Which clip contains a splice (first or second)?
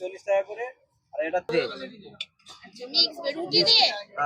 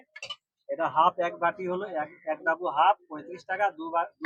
first